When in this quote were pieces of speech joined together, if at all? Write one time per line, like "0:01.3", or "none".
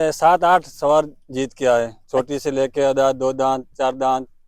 none